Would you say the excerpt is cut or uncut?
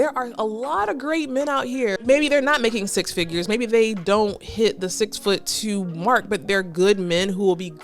uncut